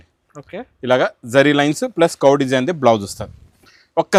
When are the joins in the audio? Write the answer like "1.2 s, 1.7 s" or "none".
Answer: none

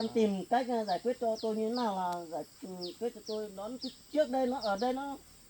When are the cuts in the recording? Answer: none

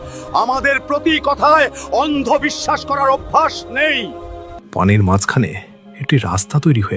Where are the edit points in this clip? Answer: 4.6 s

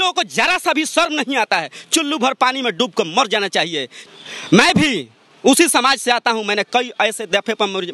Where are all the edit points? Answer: 4.0 s

